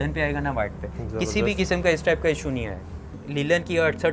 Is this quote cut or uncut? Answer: cut